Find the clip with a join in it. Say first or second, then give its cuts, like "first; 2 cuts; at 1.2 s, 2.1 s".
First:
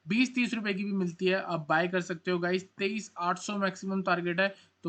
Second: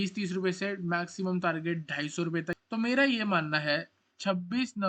second; 1 cut; at 2.6 s